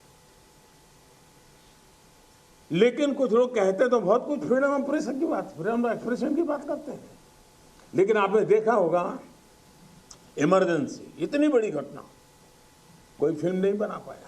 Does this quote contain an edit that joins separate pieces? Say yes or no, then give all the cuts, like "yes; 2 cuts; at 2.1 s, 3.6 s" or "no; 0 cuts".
yes; 1 cut; at 1.1 s